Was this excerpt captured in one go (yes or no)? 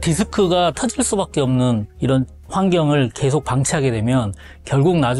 yes